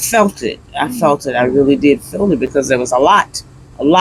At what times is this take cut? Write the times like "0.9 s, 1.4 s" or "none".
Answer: none